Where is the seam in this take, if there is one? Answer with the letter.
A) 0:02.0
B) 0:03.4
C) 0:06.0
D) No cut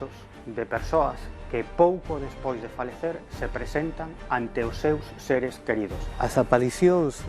C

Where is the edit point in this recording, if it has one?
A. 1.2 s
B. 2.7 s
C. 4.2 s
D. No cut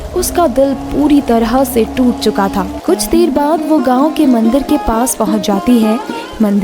B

